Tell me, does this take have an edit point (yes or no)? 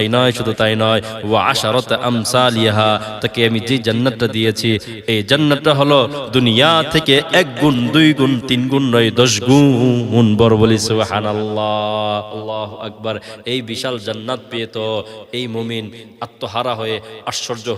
no